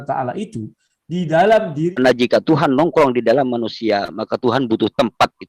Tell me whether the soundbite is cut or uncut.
cut